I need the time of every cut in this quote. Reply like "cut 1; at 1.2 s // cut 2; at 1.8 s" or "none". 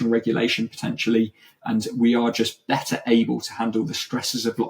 cut 1; at 1.6 s